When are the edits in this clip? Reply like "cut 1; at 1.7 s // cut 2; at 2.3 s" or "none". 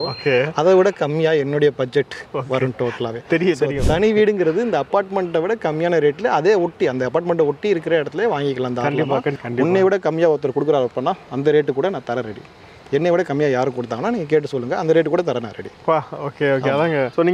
cut 1; at 9.3 s

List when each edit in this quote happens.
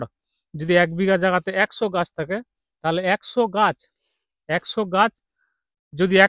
none

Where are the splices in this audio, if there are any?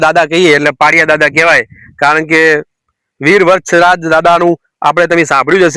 none

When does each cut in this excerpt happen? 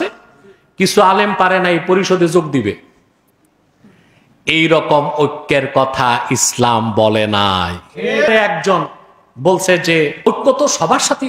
cut 1; at 8.3 s // cut 2; at 10.3 s

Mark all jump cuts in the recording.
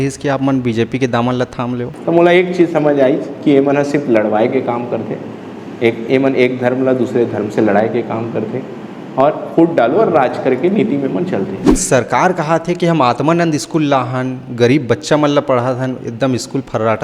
cut 1; at 1.9 s // cut 2; at 11.8 s

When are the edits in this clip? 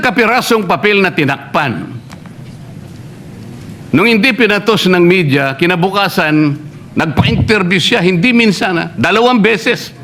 none

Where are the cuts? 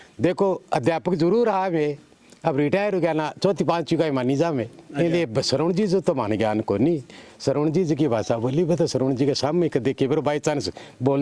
none

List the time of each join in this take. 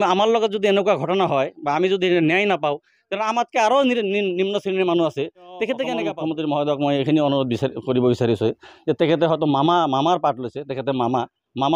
cut 1; at 6.1 s

